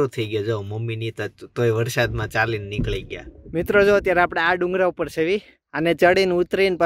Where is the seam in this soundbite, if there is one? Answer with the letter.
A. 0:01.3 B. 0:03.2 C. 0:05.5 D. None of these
B